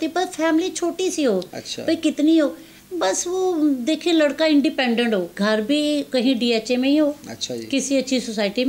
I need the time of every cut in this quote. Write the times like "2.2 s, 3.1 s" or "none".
5.3 s